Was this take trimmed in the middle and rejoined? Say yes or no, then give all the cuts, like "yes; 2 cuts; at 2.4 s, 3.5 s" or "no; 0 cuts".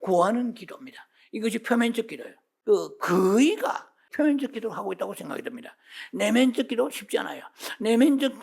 yes; 2 cuts; at 2.5 s, 4.1 s